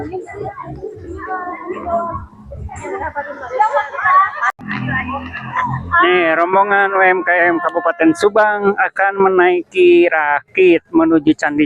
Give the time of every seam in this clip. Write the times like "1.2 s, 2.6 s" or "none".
4.6 s